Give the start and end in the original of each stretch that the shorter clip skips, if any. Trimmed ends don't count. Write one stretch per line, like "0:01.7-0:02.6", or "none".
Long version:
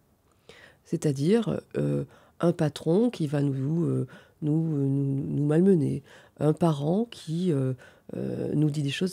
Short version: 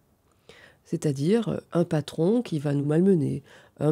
0:01.6-0:02.3
0:03.5-0:05.4